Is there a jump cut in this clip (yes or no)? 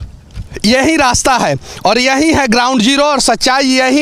no